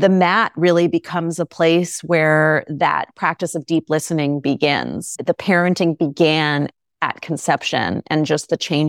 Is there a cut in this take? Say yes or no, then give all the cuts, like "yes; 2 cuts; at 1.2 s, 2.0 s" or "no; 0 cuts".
yes; 1 cut; at 5.0 s